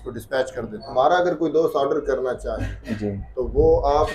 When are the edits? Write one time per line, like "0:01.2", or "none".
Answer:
0:00.9